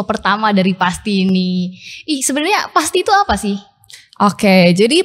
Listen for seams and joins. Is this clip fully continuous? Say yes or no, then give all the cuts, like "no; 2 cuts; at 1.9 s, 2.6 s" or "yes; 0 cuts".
yes; 0 cuts